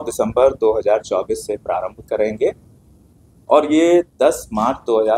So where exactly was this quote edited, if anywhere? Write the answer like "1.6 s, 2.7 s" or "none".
none